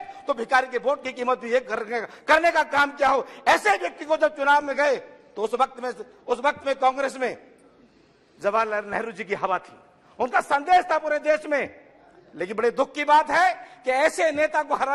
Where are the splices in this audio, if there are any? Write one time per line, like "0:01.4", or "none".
none